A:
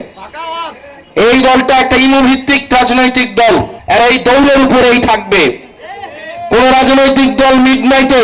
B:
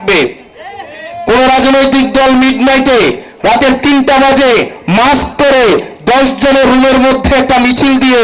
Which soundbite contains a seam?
A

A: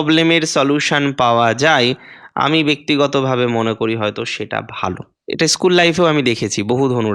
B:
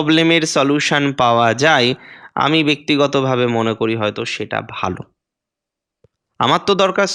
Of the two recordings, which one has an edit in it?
A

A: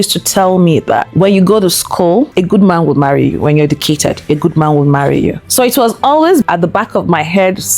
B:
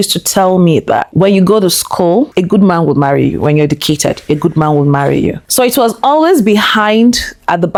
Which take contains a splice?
A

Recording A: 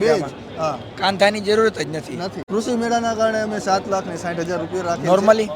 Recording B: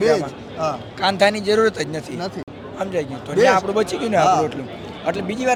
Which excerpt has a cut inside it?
A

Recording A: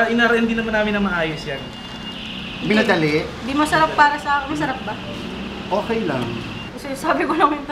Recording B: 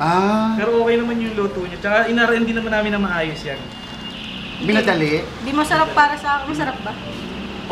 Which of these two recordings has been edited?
A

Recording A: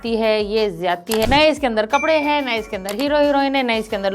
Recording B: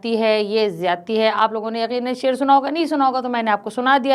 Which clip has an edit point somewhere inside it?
A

